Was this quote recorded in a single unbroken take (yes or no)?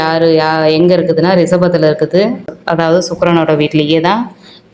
no